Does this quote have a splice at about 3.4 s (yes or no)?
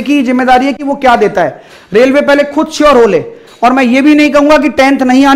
yes